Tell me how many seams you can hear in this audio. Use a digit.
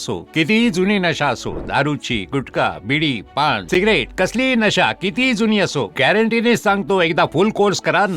0